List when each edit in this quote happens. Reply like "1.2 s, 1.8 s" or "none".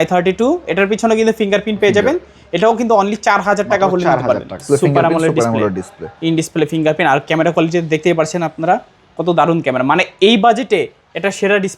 4.6 s